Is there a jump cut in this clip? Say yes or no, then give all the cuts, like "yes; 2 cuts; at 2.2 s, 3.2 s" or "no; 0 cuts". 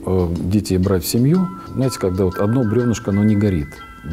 yes; 1 cut; at 1.6 s